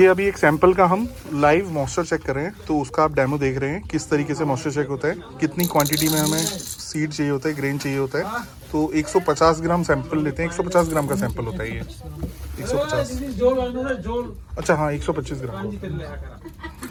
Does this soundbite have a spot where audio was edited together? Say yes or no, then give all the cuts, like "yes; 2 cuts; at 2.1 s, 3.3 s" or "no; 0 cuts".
no; 0 cuts